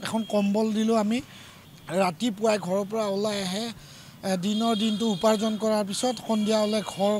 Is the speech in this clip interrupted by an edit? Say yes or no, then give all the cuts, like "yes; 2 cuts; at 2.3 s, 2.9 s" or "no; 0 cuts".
yes; 1 cut; at 1.6 s